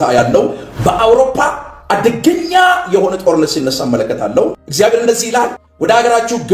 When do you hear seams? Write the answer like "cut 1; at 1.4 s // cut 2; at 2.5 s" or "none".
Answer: cut 1; at 4.6 s // cut 2; at 5.6 s